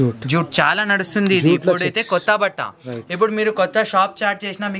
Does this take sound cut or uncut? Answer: uncut